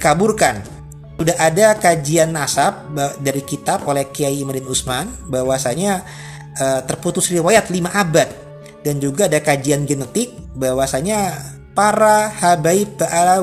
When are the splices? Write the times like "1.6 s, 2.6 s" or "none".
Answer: 1.1 s